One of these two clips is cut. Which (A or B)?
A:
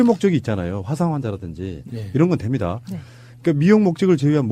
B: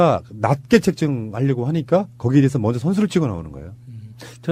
A